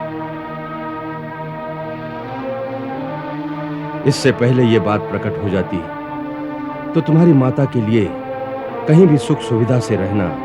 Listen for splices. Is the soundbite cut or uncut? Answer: uncut